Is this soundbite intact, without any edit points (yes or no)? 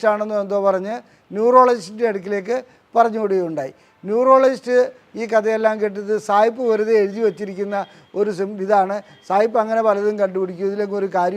yes